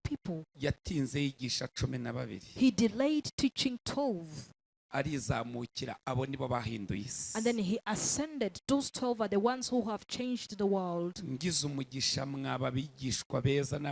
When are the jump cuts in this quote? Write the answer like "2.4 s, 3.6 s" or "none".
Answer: none